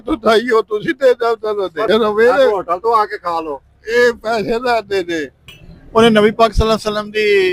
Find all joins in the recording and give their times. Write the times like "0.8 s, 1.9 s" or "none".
1.9 s, 5.4 s